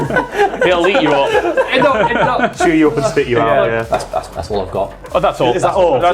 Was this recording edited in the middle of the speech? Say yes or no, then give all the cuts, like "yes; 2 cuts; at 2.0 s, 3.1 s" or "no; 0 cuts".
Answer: yes; 1 cut; at 3.9 s